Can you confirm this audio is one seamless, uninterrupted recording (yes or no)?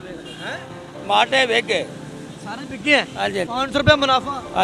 no